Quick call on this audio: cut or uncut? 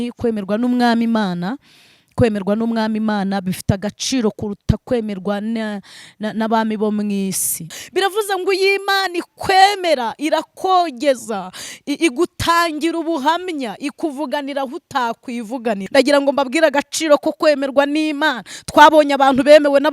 cut